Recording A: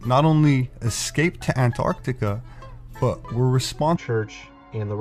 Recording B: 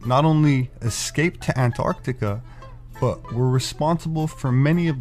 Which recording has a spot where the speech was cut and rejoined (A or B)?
B